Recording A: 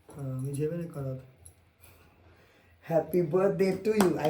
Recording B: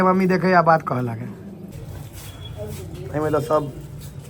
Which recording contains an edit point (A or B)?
B